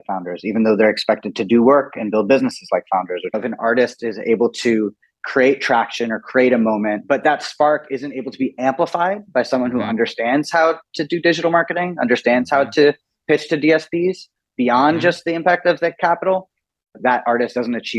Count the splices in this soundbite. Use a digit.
3